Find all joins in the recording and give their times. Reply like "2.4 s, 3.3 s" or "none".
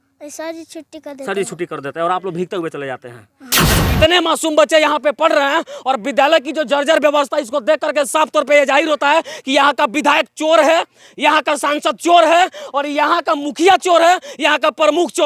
3.7 s